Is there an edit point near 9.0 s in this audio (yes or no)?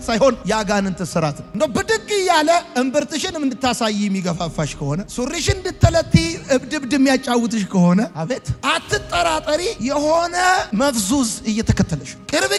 no